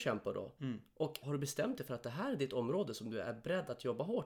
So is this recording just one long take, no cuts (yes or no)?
no